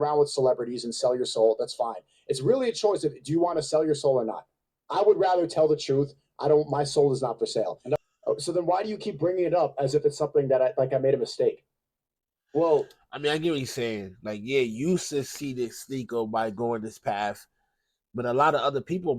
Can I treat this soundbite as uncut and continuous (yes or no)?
no